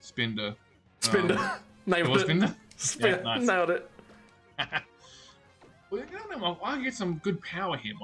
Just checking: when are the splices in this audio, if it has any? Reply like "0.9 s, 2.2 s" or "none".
none